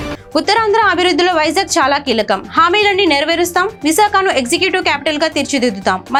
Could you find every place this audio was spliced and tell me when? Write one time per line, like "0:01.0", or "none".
none